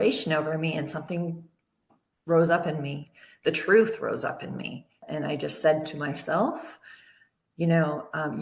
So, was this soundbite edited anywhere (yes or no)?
yes